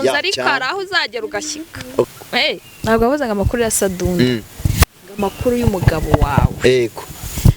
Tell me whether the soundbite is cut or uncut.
cut